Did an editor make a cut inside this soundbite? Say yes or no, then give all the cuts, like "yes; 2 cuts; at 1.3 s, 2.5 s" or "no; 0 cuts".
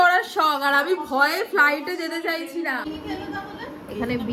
yes; 1 cut; at 2.8 s